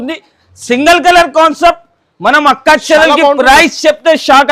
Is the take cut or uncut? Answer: uncut